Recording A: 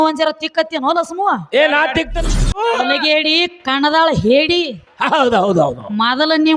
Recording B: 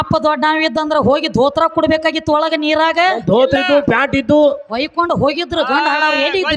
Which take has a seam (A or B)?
A